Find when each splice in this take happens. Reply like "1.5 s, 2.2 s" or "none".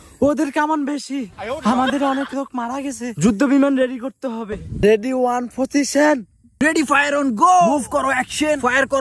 4.8 s, 6.4 s

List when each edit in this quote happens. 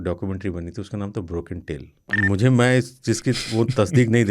2.1 s

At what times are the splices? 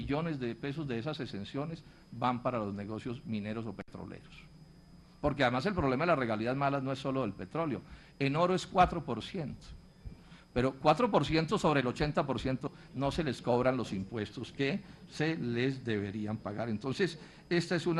none

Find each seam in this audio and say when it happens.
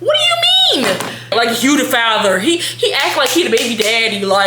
1.3 s

